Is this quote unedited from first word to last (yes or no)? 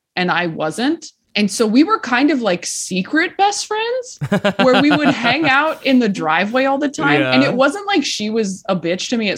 no